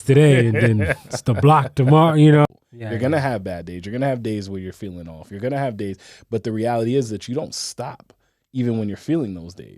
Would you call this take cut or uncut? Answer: cut